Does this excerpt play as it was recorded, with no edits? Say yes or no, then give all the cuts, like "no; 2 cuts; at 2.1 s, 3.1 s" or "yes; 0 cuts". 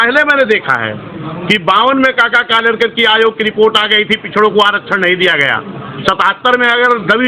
yes; 0 cuts